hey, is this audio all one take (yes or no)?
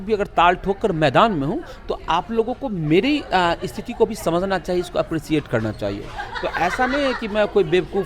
yes